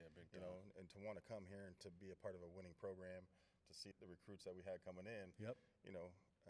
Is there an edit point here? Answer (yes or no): yes